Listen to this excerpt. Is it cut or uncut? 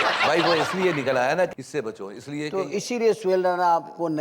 cut